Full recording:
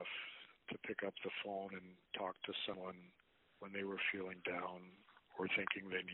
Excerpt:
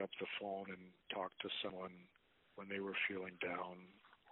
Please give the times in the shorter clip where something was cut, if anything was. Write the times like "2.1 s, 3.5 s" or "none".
none